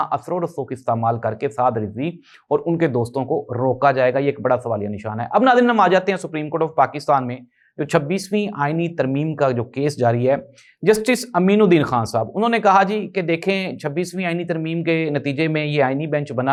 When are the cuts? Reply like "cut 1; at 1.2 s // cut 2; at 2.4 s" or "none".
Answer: none